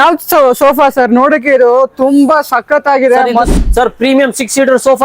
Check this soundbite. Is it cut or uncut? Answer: cut